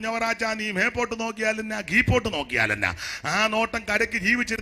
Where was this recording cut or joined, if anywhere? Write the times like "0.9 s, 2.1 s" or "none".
1.4 s